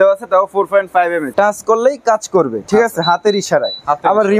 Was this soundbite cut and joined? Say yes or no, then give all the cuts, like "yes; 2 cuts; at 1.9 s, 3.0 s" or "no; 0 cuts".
yes; 1 cut; at 1.3 s